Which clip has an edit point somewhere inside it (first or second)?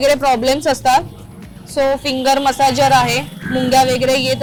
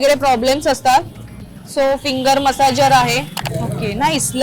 second